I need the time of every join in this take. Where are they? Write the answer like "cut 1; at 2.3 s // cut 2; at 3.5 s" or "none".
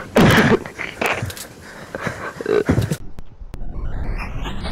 cut 1; at 3.0 s